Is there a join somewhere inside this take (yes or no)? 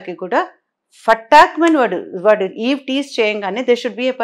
no